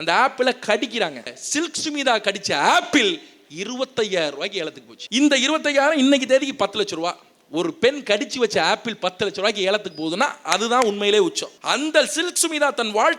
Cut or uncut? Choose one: cut